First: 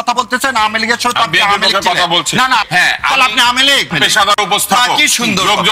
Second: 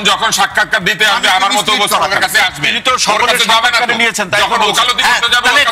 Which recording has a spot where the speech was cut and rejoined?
first; 2 cuts; at 2.6 s, 3.9 s

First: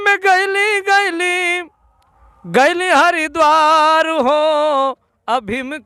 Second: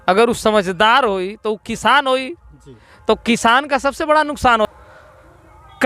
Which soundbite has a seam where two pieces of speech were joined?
second; 1 cut; at 4.7 s

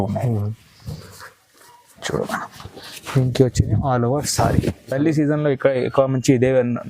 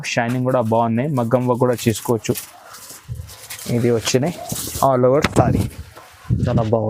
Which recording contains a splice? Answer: first; 1 cut; at 5.0 s

